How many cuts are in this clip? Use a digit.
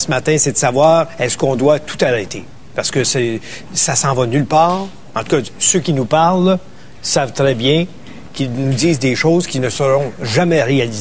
1